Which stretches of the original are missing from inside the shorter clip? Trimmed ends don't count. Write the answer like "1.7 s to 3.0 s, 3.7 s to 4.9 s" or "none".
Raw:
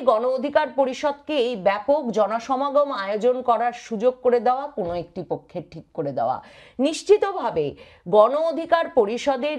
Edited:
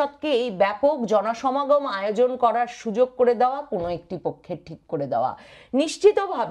none